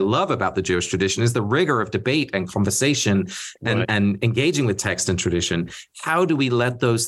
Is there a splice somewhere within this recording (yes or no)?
no